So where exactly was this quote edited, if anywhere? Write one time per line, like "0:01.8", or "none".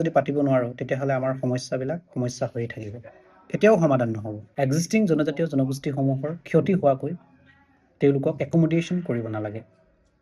0:04.4